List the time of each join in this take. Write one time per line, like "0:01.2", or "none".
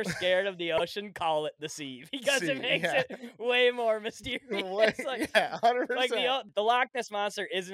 0:06.5